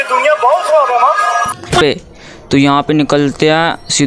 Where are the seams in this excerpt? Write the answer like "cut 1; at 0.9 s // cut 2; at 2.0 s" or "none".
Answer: cut 1; at 1.8 s